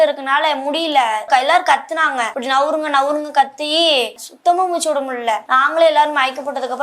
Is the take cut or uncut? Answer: cut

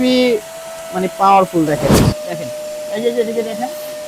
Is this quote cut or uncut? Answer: cut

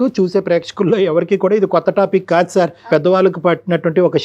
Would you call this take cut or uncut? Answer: cut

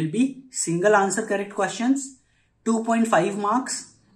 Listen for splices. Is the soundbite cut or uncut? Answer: uncut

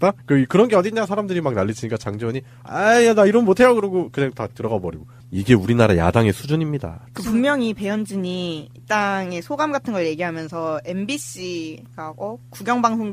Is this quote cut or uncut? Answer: cut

